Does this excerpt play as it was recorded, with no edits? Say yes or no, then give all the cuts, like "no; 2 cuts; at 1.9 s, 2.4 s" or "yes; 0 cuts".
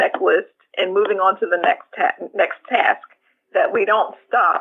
yes; 0 cuts